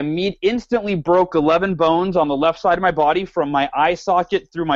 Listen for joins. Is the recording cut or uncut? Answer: uncut